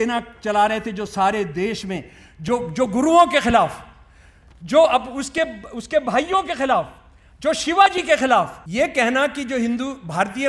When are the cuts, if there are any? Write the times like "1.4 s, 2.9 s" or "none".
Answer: 8.6 s